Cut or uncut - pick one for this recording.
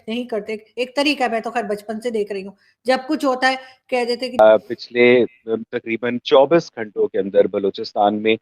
cut